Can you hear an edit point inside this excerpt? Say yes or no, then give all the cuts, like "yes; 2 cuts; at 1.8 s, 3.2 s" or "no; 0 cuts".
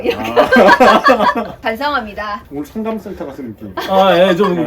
yes; 1 cut; at 2.4 s